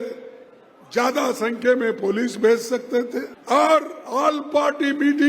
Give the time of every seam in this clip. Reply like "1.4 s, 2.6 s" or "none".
3.3 s